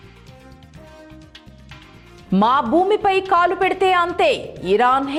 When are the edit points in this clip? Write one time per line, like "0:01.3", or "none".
none